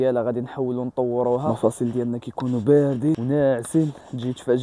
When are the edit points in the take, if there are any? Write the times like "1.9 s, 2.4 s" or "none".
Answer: 1.4 s